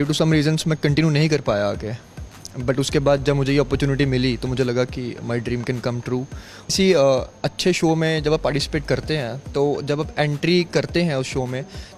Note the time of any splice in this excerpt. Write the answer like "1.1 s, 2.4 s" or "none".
6.7 s